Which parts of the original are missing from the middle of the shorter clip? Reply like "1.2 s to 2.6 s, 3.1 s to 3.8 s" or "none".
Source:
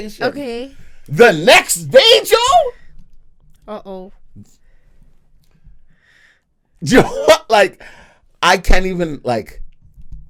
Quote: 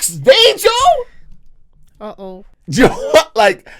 4.2 s to 6.7 s